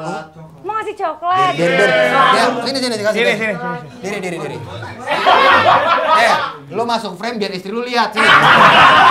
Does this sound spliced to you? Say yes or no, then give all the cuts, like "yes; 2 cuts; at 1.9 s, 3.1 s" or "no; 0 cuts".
no; 0 cuts